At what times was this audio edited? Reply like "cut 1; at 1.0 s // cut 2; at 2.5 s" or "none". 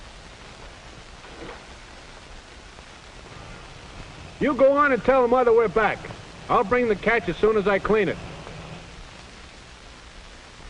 cut 1; at 3.5 s